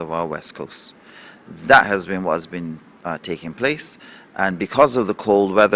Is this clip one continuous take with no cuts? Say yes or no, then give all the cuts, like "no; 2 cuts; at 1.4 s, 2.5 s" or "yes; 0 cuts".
yes; 0 cuts